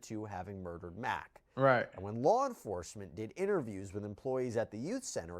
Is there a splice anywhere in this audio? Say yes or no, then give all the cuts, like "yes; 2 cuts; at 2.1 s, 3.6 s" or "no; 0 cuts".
no; 0 cuts